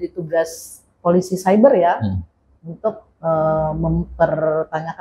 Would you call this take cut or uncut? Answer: uncut